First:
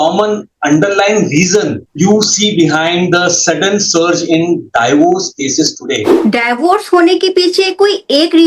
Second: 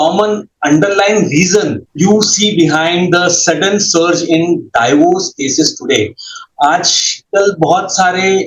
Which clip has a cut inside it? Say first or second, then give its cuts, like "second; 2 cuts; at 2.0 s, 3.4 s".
first; 1 cut; at 6.1 s